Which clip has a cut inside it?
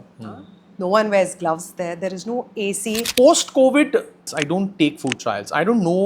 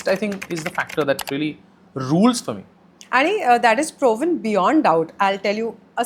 first; 2 cuts; at 3.1 s, 4.3 s

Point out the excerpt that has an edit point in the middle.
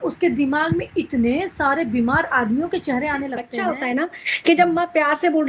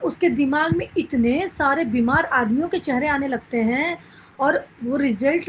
first; 1 cut; at 3.6 s

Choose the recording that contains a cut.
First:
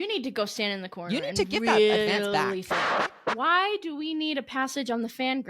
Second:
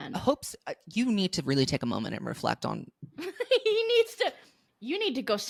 first; 1 cut; at 2.9 s

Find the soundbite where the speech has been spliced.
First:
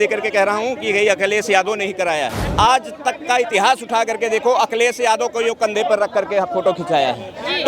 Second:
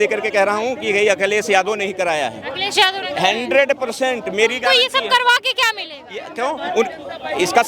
first; 1 cut; at 2.4 s

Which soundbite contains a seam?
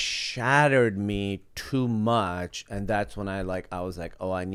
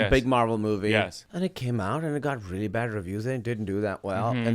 second; 1 cut; at 1.2 s

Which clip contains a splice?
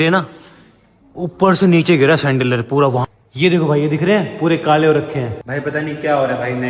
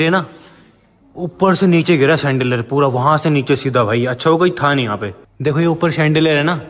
first; 2 cuts; at 3.0 s, 5.4 s

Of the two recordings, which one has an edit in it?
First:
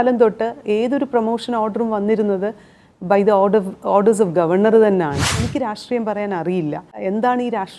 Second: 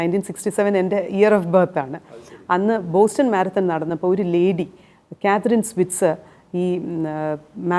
first; 2 cuts; at 5.4 s, 6.9 s

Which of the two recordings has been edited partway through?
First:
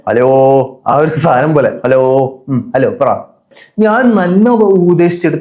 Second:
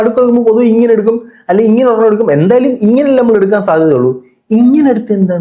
first; 1 cut; at 3.5 s

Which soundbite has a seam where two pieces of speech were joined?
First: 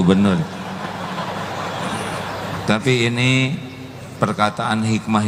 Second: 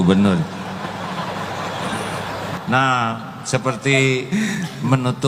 second; 1 cut; at 2.6 s

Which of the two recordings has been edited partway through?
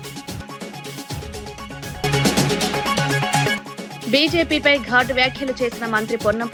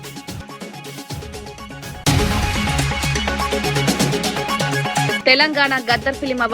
second; 1 cut; at 1.8 s

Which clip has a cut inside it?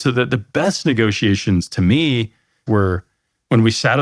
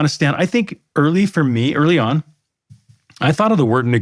first; 1 cut; at 2.6 s

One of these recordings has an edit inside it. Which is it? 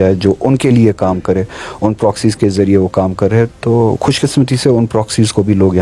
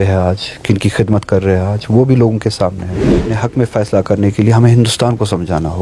second; 1 cut; at 3.3 s

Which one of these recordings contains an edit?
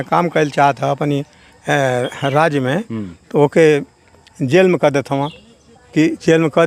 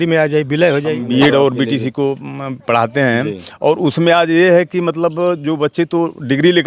second; 1 cut; at 1.0 s

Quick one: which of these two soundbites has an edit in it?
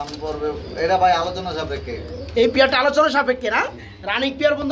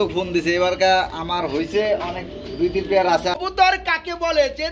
second; 1 cut; at 3.4 s

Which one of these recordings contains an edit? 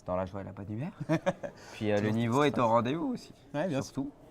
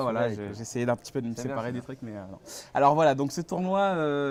first; 1 cut; at 1.0 s

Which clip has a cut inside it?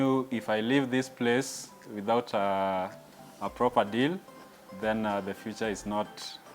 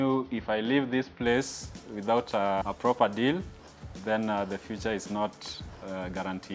second; 1 cut; at 2.6 s

